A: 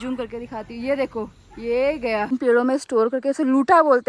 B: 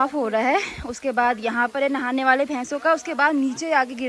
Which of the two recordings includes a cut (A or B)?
A